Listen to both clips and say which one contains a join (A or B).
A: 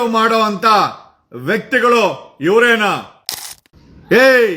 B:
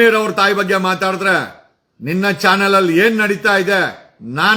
A